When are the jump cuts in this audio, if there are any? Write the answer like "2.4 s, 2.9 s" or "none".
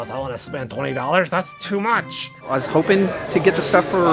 2.3 s

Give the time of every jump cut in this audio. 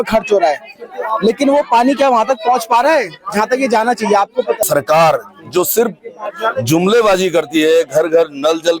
4.6 s

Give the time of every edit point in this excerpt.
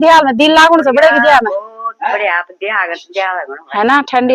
none

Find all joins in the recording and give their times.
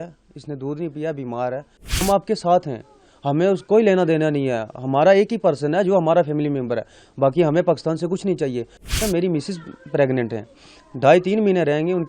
2.0 s, 9.0 s

